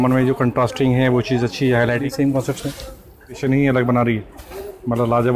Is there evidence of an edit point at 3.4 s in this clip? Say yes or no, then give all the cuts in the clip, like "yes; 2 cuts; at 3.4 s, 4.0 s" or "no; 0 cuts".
yes; 2 cuts; at 2.0 s, 3.4 s